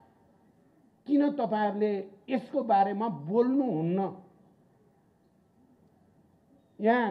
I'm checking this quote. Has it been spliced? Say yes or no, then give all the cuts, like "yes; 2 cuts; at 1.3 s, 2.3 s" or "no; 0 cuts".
no; 0 cuts